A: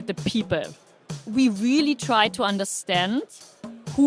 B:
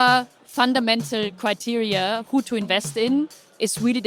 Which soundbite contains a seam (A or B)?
A